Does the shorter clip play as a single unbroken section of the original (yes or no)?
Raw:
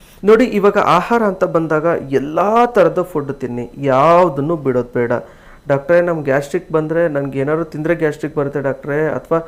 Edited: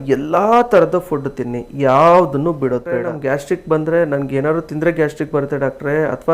no